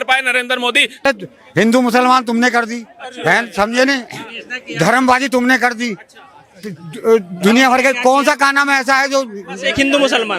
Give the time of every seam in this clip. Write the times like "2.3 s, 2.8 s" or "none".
1.1 s